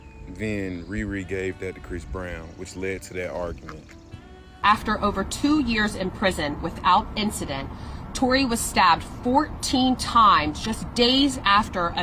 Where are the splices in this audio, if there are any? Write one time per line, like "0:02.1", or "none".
0:04.5